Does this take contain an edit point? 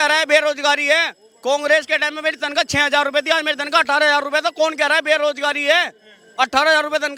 no; 0 cuts

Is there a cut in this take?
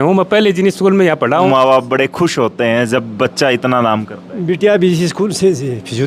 yes; 1 cut; at 1.5 s

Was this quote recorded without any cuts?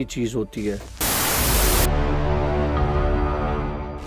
yes; 0 cuts

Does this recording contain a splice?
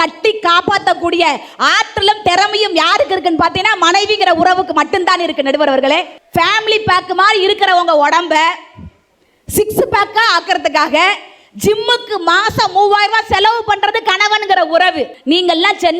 yes; 2 cuts; at 6.2 s, 15.1 s

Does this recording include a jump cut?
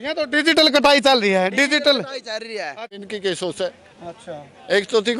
yes; 1 cut; at 3.0 s

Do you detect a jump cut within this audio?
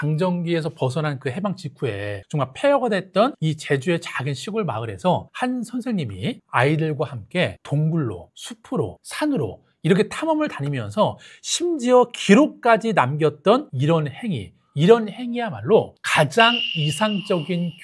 no; 0 cuts

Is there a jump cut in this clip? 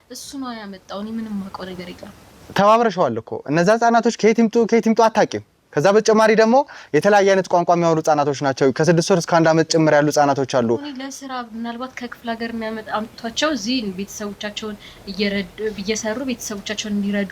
no; 0 cuts

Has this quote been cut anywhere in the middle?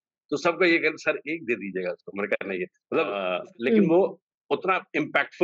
yes; 1 cut; at 3.1 s

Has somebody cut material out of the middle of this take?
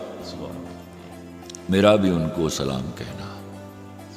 yes; 1 cut; at 2.9 s

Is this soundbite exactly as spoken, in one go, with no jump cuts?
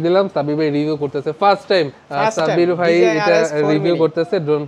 no; 1 cut; at 2.0 s

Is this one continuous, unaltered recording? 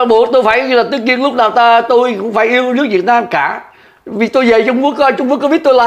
yes; 0 cuts

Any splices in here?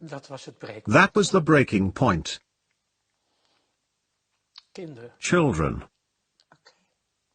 no; 0 cuts

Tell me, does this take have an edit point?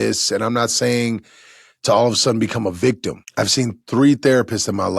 yes; 1 cut; at 3.2 s

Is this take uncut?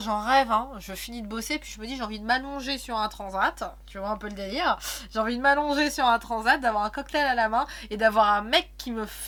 yes; 0 cuts

